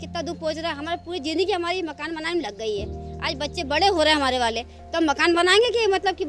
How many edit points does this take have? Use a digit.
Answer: 0